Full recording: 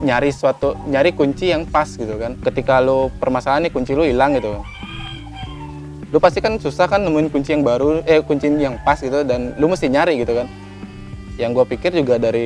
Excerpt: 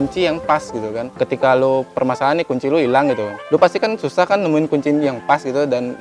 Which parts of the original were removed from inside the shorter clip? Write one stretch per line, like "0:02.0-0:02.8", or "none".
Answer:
0:04.6-0:06.0
0:07.3-0:08.3